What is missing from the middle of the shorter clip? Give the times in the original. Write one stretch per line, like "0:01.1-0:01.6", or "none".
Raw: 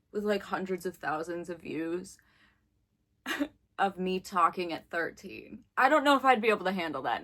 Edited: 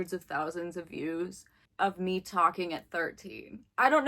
0:02.4-0:03.6